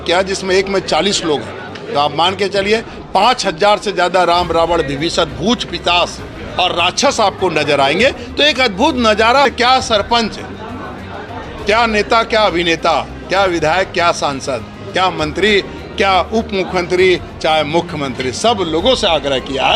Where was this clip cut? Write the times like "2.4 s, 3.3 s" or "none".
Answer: 9.4 s